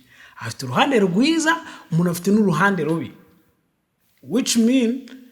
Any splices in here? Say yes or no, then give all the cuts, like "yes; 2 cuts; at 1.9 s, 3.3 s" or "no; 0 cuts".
no; 0 cuts